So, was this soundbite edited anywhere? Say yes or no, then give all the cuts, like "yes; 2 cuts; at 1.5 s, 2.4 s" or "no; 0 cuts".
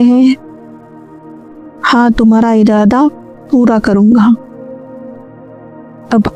no; 0 cuts